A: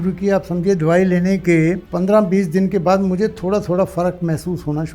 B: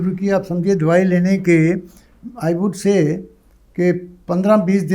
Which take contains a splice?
A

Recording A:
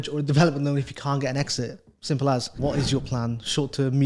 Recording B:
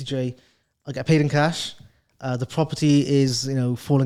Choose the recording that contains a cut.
A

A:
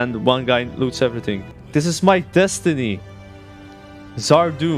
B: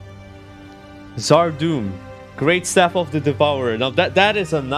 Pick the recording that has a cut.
A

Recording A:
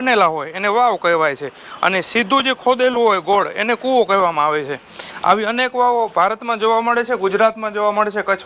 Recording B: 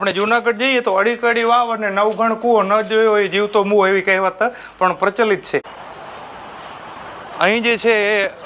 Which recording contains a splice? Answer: B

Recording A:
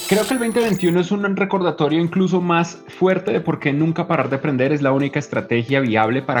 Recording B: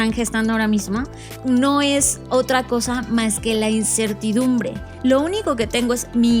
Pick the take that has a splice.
B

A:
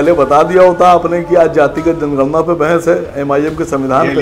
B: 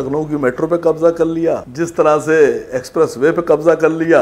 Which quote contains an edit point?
B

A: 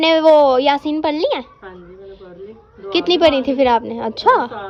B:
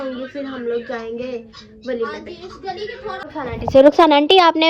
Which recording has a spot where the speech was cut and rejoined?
B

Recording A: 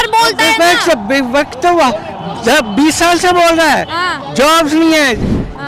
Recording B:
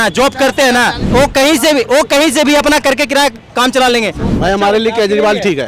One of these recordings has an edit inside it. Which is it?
B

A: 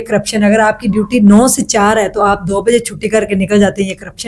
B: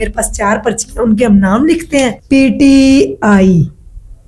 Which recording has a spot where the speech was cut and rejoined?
B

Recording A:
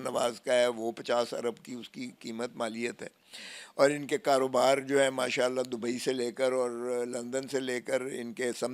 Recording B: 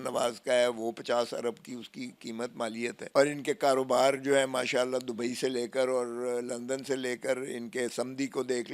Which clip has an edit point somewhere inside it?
B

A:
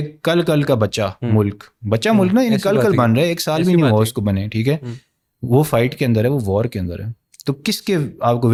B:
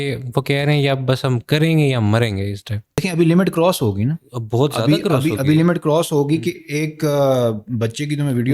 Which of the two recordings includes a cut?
B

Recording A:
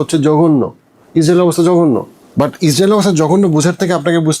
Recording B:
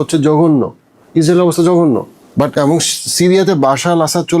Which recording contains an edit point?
B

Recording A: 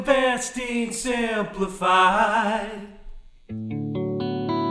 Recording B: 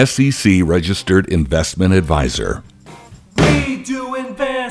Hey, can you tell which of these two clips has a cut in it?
B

